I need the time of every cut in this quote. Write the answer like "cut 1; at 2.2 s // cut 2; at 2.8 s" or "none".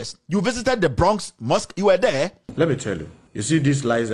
cut 1; at 2.4 s // cut 2; at 3.2 s